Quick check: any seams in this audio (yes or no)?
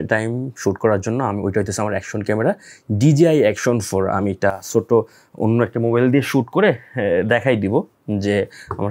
no